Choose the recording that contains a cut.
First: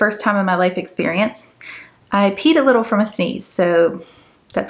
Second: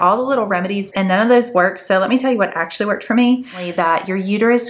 second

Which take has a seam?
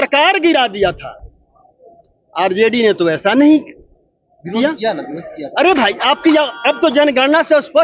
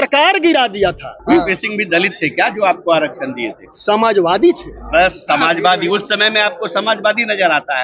second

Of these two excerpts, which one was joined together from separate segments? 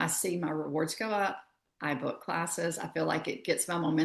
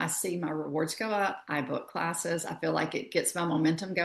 second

